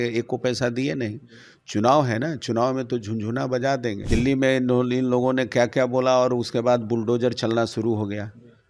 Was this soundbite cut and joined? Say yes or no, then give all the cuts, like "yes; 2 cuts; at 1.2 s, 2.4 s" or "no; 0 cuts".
yes; 1 cut; at 4.0 s